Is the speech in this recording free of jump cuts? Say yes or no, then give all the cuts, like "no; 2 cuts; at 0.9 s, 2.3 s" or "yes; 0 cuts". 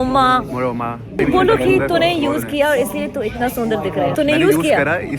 no; 2 cuts; at 1.2 s, 4.1 s